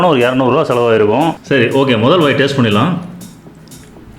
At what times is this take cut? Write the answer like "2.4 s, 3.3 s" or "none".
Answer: 1.4 s